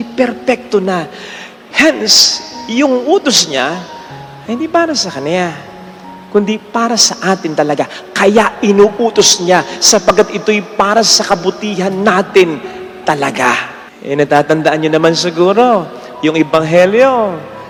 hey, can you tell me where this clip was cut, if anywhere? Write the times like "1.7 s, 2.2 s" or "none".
none